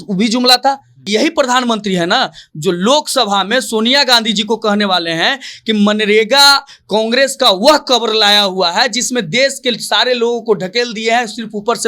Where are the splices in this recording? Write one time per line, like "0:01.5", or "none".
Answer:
0:01.1